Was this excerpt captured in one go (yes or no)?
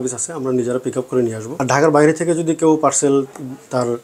no